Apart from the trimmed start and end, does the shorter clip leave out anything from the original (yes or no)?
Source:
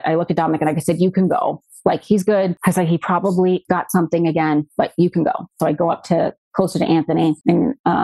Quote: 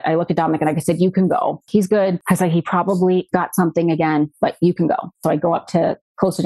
yes